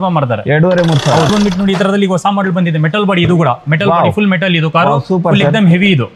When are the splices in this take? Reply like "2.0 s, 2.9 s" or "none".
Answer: 1.3 s